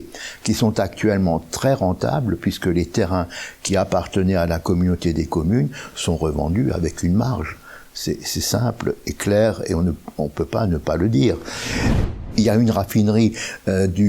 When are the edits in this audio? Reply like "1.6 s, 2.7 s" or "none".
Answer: 12.1 s